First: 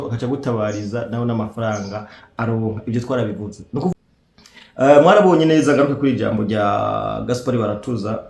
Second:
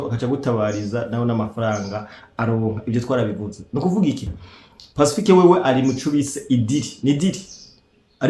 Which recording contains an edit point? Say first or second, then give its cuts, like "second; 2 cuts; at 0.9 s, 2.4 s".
first; 1 cut; at 3.9 s